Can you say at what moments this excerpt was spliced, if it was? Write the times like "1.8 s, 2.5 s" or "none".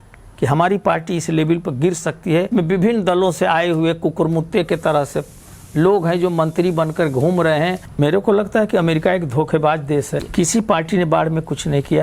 2.5 s, 7.9 s, 10.3 s

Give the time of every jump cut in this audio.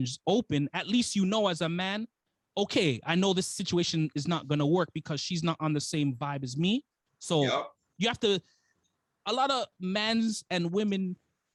none

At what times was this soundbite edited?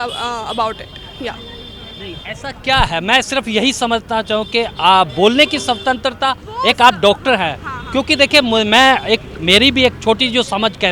none

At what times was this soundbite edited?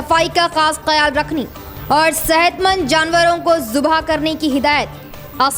none

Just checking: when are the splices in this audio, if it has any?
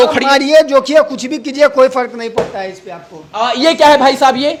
none

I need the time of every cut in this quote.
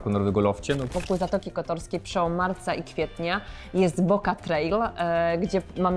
0.9 s

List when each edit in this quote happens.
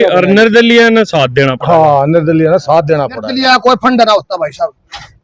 3.2 s

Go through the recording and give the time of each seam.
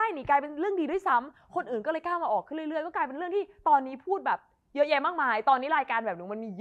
none

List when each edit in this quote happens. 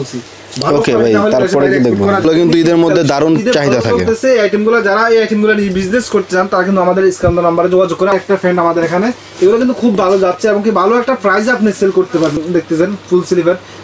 2.2 s, 8.1 s, 12.4 s

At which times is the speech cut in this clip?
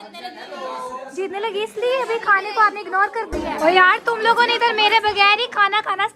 3.4 s

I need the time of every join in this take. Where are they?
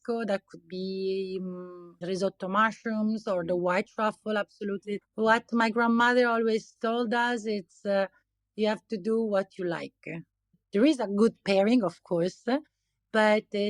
2.0 s, 5.0 s, 10.6 s

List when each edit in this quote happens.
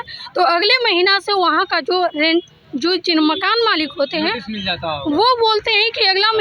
none

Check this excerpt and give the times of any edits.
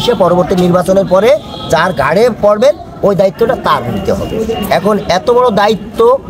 none

